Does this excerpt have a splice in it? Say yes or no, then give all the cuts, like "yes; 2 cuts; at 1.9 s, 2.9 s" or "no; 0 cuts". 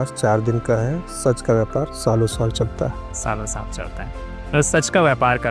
no; 0 cuts